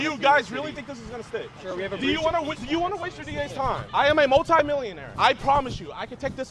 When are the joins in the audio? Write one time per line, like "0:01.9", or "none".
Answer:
0:05.0